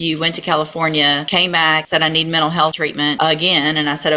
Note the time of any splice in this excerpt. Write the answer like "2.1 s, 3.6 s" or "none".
1.7 s, 2.8 s